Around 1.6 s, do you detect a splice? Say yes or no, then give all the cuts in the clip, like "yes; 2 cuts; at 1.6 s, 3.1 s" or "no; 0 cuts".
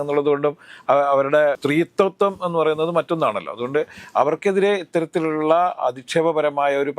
yes; 1 cut; at 1.6 s